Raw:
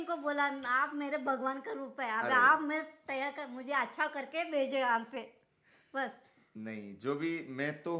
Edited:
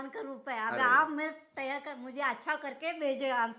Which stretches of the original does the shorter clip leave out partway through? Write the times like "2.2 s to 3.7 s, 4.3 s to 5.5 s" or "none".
none